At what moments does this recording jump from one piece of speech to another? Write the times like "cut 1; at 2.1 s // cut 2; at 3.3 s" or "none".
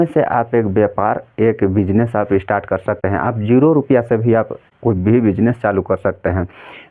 cut 1; at 3.0 s // cut 2; at 4.6 s

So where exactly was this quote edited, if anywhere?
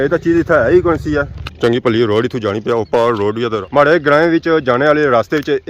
cut 1; at 1.4 s // cut 2; at 3.6 s

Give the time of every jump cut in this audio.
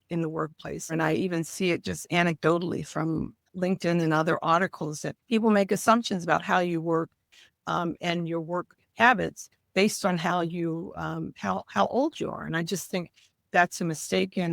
cut 1; at 0.9 s // cut 2; at 3.4 s // cut 3; at 5.1 s

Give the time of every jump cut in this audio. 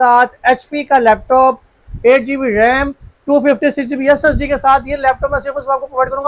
none

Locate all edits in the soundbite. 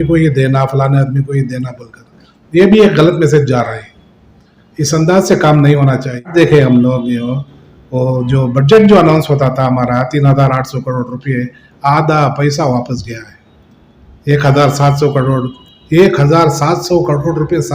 cut 1; at 6.3 s

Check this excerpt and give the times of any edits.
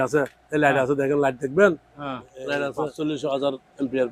cut 1; at 2.8 s

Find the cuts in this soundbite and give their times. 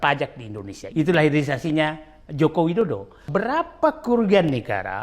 cut 1; at 0.9 s // cut 2; at 3.2 s

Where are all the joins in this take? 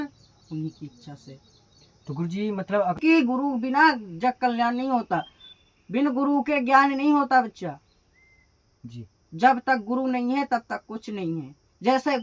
cut 1; at 3.0 s

